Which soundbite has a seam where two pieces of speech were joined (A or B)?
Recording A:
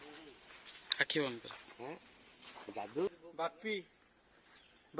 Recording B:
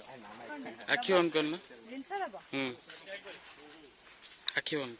A